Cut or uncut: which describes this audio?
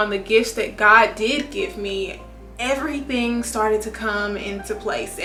uncut